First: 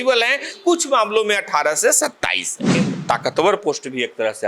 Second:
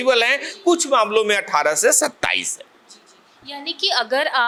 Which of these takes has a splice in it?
first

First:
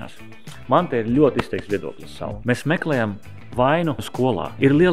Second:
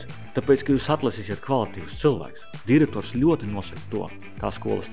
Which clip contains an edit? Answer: first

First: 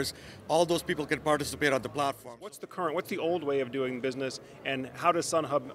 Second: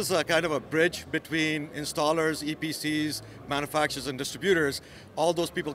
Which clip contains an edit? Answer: first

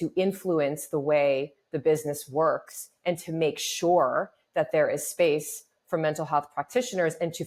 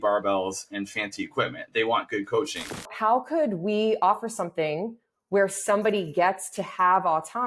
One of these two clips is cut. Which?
second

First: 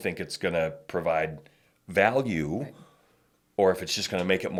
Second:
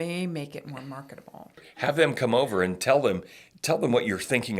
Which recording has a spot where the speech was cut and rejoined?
second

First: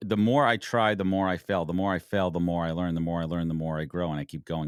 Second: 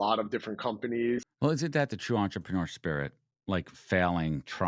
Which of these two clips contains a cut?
second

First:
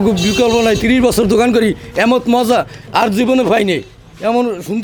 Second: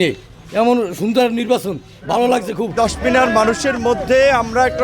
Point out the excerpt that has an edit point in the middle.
second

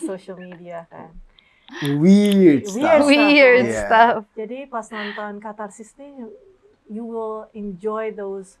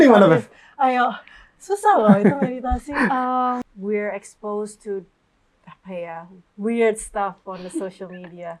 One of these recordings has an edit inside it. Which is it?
second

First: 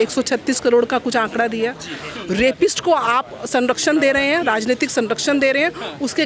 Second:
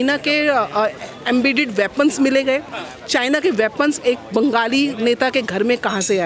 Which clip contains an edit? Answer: first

